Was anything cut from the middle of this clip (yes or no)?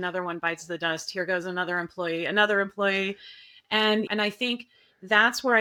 no